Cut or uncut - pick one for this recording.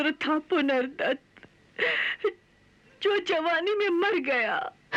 uncut